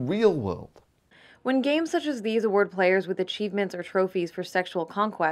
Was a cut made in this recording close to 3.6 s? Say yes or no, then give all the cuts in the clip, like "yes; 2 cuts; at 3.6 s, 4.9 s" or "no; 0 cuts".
no; 0 cuts